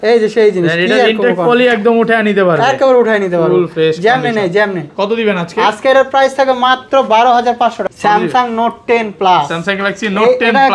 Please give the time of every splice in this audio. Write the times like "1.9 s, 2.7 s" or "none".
7.8 s